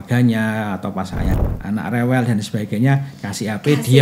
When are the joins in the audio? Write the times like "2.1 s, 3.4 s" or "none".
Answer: 1.3 s